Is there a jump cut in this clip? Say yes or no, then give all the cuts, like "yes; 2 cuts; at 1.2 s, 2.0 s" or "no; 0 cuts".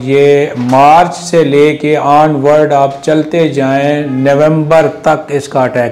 no; 0 cuts